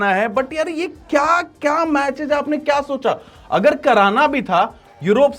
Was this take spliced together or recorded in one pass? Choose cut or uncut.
uncut